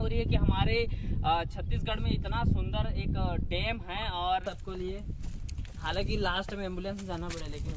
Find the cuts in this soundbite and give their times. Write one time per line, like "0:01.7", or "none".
0:04.4